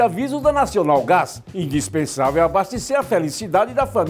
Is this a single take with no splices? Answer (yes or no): yes